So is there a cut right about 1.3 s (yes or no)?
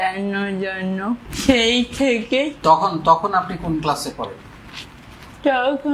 yes